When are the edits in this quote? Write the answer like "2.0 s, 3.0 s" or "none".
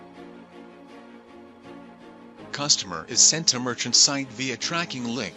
2.5 s